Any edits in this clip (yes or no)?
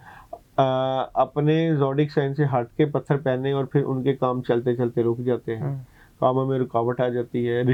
no